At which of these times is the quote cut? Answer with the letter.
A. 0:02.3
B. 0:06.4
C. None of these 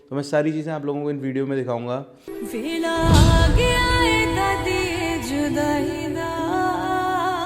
A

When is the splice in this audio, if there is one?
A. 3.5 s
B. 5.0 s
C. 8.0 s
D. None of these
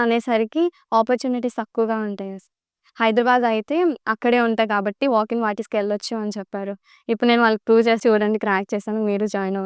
C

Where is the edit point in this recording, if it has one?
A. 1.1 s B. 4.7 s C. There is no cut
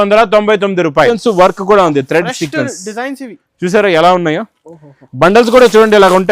A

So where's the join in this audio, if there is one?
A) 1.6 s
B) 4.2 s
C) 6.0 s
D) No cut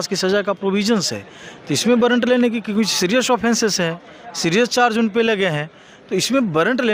D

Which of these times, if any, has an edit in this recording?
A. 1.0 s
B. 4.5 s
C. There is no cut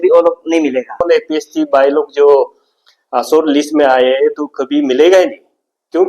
A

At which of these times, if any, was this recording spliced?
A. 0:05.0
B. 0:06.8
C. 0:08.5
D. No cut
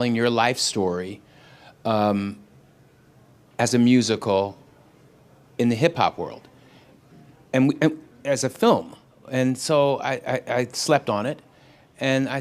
C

